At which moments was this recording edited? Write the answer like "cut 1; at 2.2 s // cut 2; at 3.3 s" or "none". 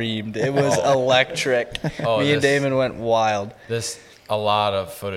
none